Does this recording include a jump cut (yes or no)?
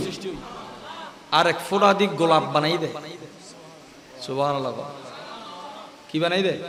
no